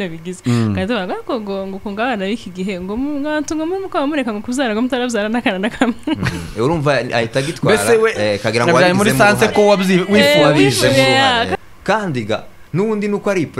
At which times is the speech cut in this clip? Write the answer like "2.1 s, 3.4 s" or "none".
11.5 s